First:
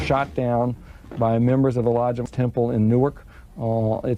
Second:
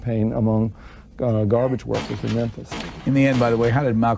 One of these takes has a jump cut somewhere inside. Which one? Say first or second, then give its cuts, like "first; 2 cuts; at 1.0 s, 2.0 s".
first; 1 cut; at 2.3 s